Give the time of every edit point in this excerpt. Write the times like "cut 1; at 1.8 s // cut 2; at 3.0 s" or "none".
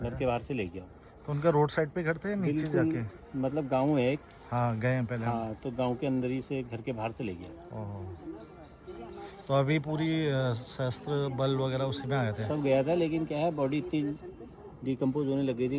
none